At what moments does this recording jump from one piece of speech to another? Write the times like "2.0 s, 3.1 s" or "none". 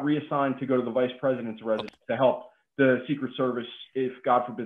1.9 s